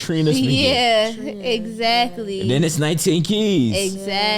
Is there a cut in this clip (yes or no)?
no